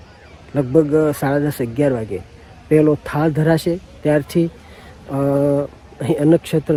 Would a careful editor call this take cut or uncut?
uncut